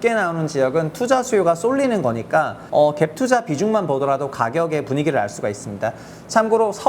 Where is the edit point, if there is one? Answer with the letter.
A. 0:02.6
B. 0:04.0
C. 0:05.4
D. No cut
A